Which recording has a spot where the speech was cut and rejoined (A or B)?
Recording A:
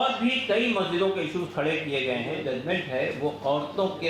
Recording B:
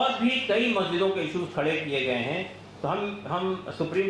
A